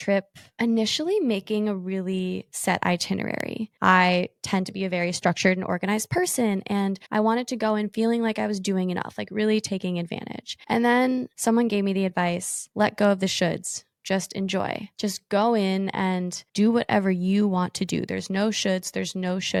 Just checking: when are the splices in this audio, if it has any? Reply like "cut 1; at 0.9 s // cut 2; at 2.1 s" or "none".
none